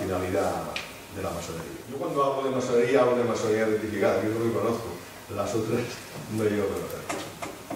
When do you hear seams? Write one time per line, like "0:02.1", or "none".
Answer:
0:01.9